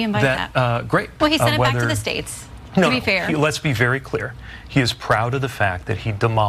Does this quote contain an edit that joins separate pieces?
yes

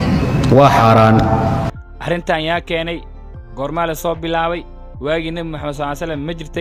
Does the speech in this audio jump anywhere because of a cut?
no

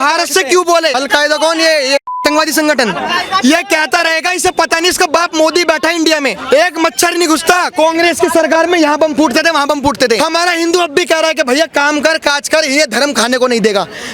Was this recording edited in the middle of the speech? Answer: yes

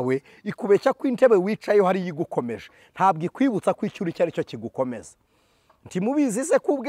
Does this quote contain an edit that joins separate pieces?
no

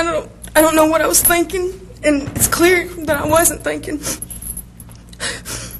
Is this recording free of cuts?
yes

